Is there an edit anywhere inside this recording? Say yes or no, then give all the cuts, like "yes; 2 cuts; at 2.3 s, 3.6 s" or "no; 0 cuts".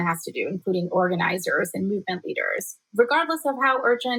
no; 0 cuts